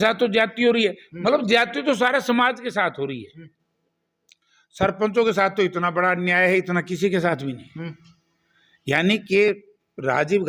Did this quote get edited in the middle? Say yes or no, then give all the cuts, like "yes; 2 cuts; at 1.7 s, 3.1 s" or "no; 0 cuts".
no; 0 cuts